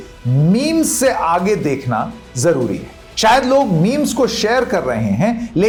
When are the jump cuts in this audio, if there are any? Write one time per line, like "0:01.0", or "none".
none

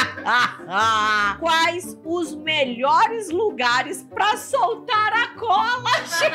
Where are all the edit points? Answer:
none

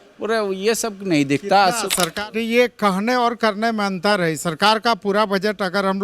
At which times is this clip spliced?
0:02.1

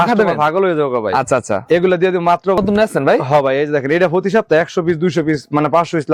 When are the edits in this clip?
0:02.6

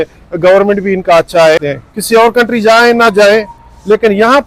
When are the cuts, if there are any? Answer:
0:01.8

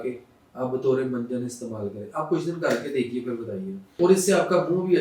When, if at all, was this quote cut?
0:03.9

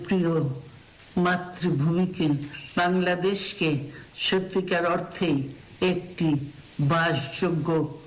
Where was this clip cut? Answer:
none

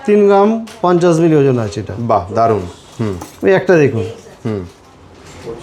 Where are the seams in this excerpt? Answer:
none

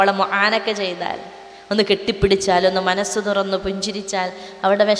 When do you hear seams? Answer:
none

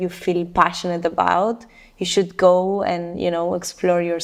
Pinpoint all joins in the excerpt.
none

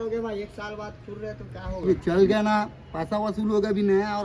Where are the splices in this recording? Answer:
0:01.8

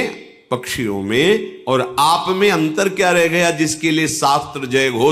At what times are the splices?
none

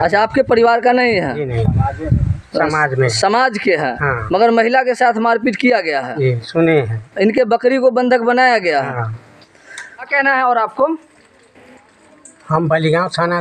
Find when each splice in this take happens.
none

